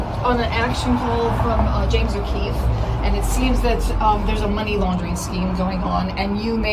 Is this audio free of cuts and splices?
yes; 0 cuts

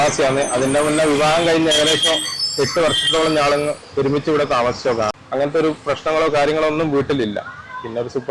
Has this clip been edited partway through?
yes; 1 cut; at 5.1 s

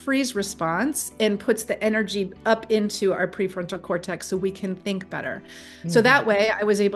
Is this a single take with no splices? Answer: yes; 0 cuts

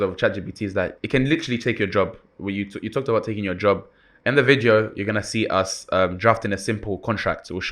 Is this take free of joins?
no; 1 cut; at 1.0 s

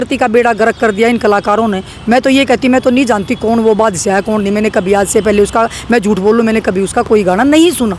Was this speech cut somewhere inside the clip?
no; 0 cuts

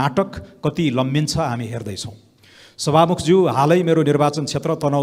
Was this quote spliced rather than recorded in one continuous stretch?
no; 0 cuts

